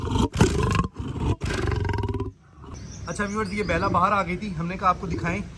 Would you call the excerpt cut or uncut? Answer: cut